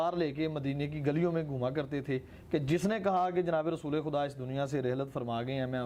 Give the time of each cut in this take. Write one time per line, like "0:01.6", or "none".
none